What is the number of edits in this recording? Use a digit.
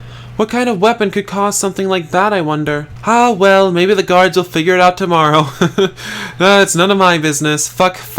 1